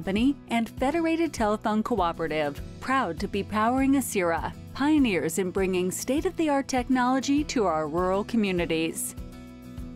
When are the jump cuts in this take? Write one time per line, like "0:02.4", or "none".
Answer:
0:09.0